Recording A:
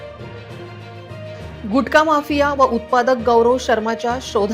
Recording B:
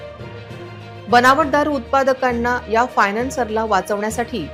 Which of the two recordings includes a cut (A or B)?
A